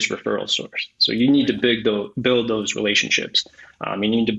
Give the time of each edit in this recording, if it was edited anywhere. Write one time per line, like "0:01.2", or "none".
none